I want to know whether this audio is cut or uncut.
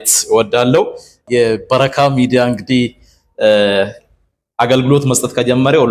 cut